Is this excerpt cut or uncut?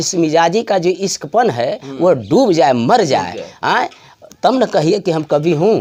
uncut